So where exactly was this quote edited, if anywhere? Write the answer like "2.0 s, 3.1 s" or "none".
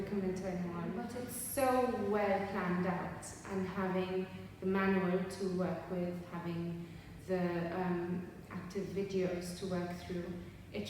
1.0 s